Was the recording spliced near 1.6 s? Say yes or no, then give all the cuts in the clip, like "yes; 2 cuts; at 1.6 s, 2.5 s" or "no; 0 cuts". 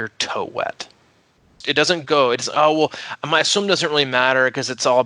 yes; 1 cut; at 1.6 s